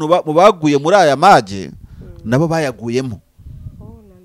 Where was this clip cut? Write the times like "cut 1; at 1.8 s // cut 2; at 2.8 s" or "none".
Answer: none

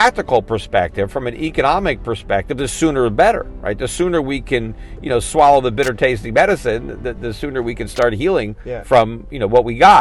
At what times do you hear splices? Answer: none

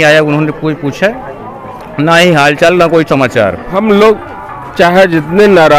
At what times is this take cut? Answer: cut 1; at 3.6 s

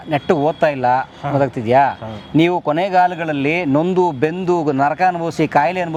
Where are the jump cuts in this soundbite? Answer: none

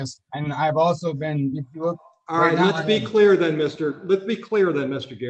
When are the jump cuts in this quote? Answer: none

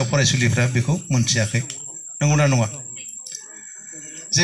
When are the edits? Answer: none

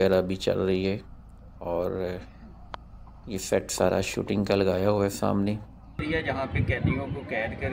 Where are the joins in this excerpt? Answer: cut 1; at 6.0 s

